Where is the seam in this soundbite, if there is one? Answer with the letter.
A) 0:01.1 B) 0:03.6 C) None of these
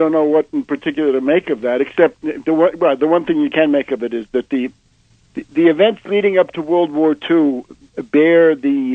A